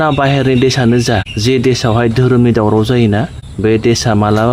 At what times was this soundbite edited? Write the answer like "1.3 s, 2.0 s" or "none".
1.3 s, 3.4 s

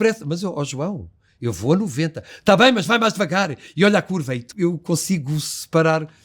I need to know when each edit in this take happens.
4.5 s

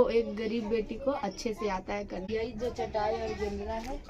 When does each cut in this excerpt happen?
2.2 s

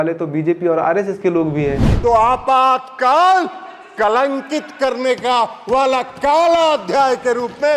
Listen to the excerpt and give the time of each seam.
1.9 s

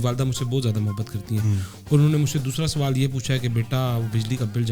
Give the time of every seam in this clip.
none

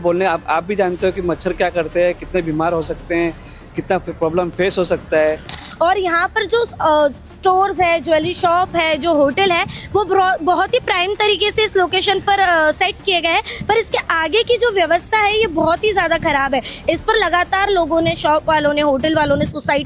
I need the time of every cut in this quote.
5.6 s

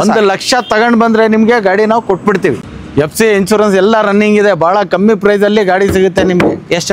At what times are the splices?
2.7 s

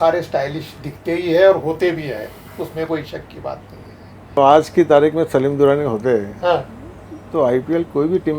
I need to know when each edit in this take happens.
4.4 s

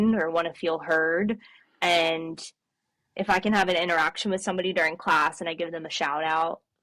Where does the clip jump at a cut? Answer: none

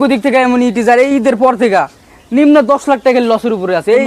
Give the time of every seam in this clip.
none

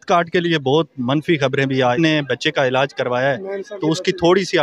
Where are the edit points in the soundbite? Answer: 1.9 s

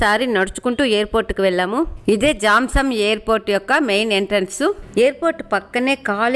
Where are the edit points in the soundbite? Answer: none

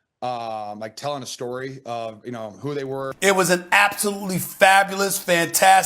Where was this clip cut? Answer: 3.1 s

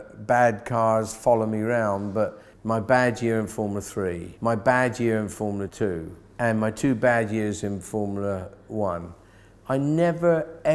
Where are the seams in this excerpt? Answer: 2.5 s, 4.3 s, 5.8 s

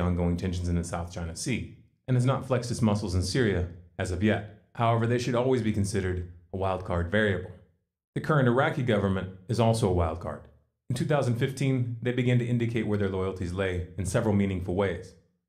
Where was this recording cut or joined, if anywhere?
none

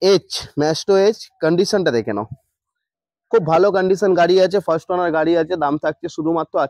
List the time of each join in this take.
none

